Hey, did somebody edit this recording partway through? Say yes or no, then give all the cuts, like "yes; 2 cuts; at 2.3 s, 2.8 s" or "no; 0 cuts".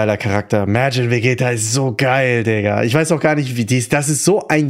no; 0 cuts